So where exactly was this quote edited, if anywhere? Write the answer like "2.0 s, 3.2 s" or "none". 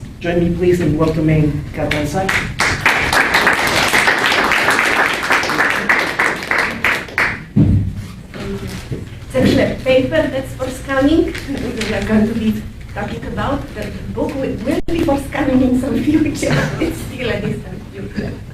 6.8 s